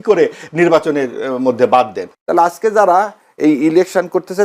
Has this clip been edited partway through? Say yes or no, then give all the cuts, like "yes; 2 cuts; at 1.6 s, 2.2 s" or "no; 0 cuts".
yes; 1 cut; at 2.0 s